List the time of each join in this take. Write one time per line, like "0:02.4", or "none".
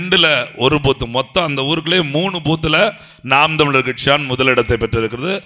none